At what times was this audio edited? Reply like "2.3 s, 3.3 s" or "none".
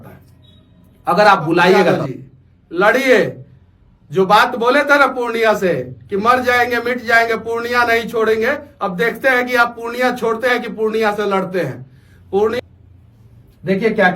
2.1 s, 12.6 s